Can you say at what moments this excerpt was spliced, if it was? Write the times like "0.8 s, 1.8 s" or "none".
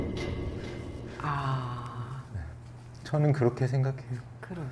1.2 s

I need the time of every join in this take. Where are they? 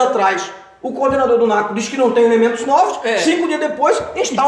none

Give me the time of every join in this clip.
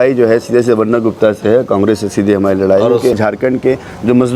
3.1 s

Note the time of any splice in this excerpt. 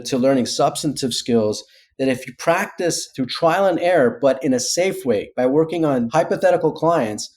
3.1 s, 6.1 s

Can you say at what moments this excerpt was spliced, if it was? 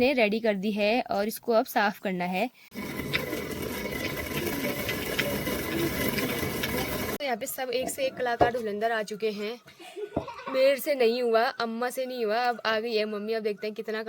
2.7 s, 7.2 s

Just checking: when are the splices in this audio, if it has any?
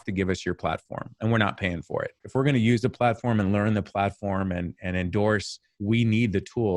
none

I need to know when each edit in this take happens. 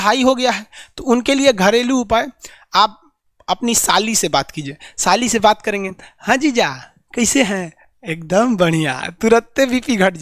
none

